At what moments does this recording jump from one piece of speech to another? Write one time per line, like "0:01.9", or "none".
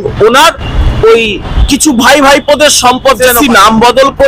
0:03.3